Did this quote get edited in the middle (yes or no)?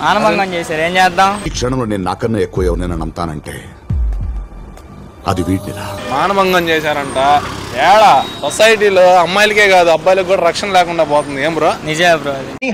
no